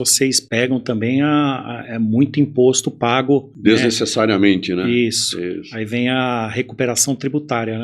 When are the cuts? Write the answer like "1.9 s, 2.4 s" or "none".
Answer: 3.5 s